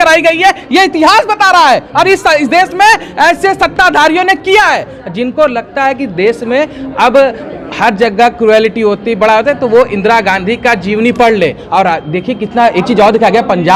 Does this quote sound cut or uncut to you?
uncut